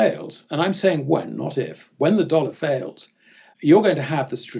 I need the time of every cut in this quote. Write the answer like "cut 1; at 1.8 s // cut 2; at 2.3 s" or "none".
cut 1; at 3.4 s